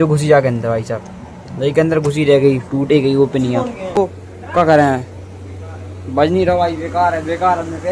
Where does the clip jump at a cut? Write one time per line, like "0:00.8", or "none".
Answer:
0:04.0